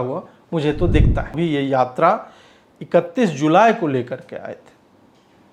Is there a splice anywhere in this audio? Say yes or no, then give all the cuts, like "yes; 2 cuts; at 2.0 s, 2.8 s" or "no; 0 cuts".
yes; 1 cut; at 1.3 s